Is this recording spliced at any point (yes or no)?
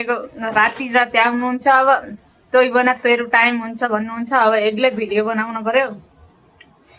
no